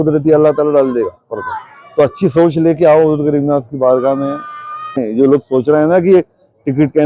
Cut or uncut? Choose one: cut